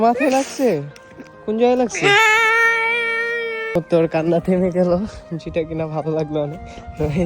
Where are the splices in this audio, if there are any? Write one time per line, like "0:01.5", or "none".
0:03.8

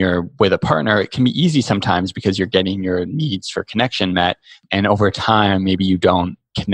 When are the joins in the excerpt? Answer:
0:04.5

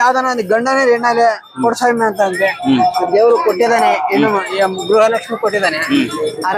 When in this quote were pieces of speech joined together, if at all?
none

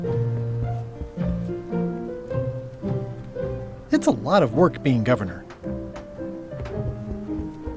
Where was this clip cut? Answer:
none

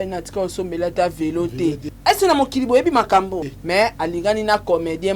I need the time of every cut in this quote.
0:01.9
0:03.5

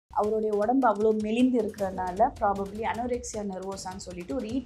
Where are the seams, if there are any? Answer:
none

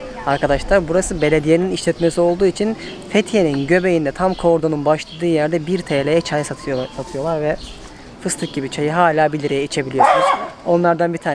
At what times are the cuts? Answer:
none

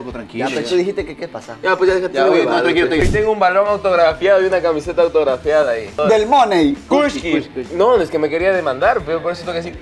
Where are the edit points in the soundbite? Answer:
0:03.1
0:06.0
0:06.8

